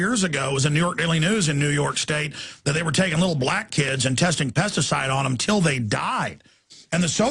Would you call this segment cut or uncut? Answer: cut